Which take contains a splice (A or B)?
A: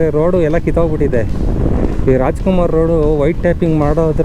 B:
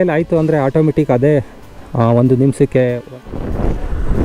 B